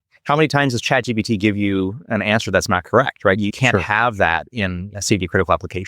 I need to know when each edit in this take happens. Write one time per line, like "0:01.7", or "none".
0:03.5
0:05.0

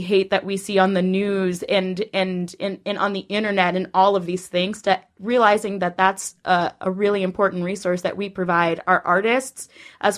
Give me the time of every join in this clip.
none

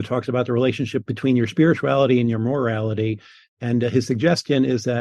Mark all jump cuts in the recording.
0:01.0

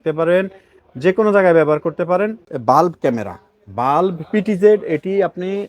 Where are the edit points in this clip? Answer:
0:02.4

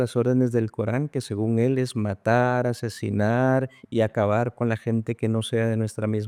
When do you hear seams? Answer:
none

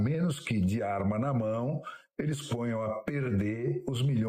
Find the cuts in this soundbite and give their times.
none

